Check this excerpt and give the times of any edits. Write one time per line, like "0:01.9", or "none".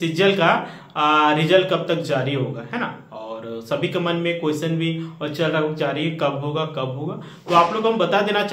none